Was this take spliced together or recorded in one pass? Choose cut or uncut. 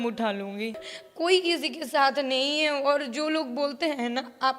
cut